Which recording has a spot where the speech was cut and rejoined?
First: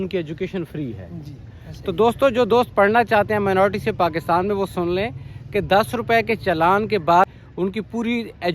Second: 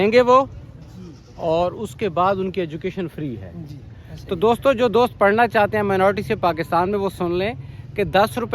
first; 1 cut; at 7.3 s

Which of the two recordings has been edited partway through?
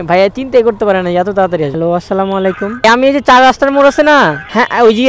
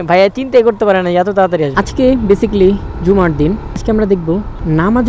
second; 1 cut; at 1.7 s

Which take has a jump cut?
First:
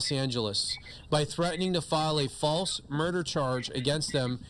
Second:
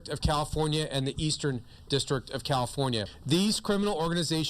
second; 1 cut; at 3.2 s

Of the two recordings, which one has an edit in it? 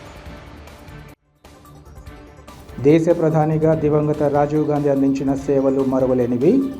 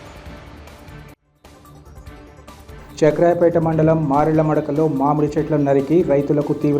first; 1 cut; at 2.5 s

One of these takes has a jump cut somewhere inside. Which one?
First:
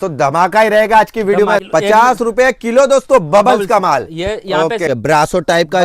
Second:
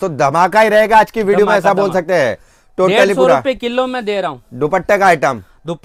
first; 2 cuts; at 1.6 s, 4.9 s

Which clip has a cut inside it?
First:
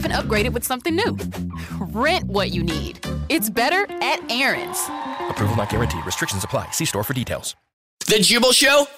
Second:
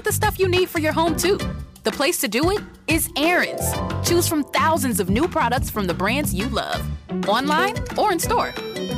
first; 1 cut; at 8.0 s

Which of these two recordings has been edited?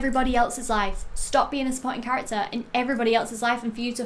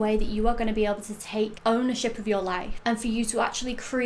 second; 2 cuts; at 1.6 s, 2.7 s

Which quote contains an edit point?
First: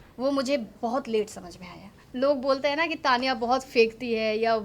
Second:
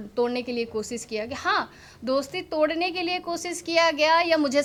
first; 1 cut; at 2.0 s

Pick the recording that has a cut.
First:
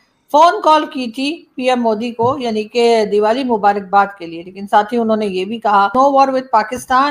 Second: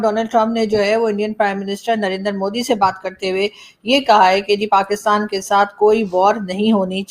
first; 1 cut; at 5.9 s

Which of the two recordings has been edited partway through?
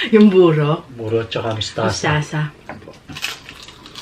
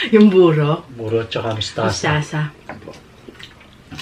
first; 1 cut; at 3.0 s

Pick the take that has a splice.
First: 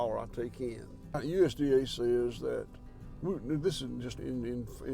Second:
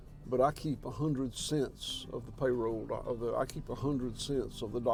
first; 2 cuts; at 1.2 s, 4.2 s

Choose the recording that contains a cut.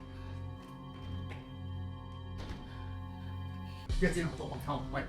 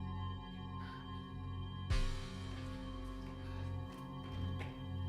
first; 1 cut; at 3.8 s

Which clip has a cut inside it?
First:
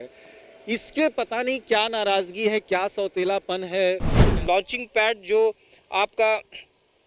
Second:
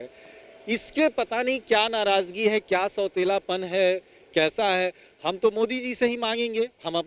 first; 1 cut; at 4.2 s

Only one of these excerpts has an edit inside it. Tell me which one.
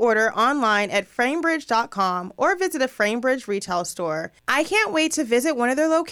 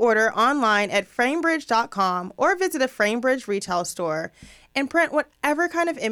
first; 1 cut; at 4.4 s

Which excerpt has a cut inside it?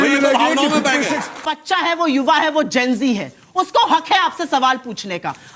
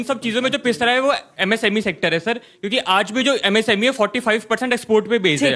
first; 1 cut; at 1.5 s

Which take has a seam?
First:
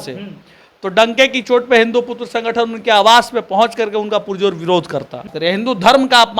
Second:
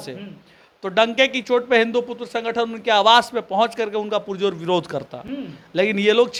first; 1 cut; at 5.3 s

